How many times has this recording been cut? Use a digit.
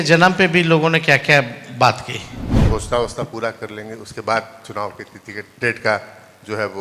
1